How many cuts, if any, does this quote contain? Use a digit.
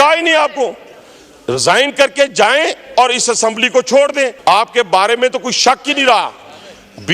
1